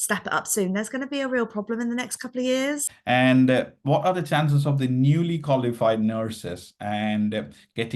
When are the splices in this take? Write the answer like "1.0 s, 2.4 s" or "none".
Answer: 3.0 s